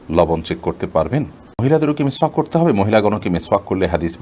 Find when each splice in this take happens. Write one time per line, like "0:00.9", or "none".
0:01.6